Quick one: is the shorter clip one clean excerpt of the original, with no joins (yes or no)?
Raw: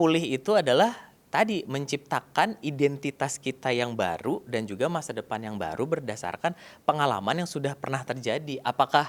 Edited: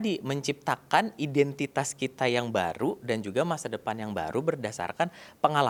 yes